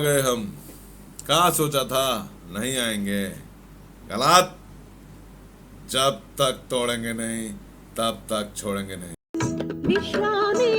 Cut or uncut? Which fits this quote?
cut